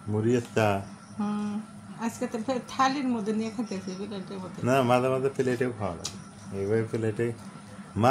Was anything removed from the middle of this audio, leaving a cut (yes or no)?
no